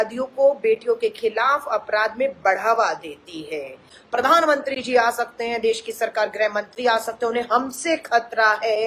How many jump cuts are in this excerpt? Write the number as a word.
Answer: one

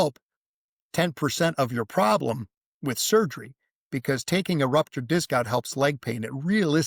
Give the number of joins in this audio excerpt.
zero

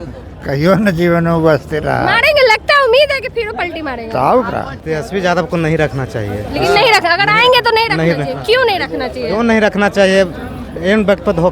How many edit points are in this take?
one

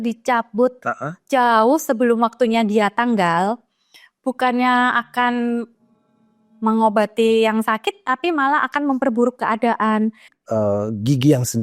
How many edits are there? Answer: one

